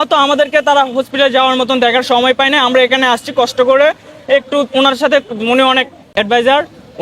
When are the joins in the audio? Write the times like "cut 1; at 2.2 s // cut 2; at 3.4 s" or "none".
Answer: cut 1; at 6.1 s